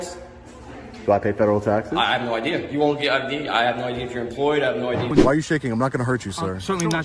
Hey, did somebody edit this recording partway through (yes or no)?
yes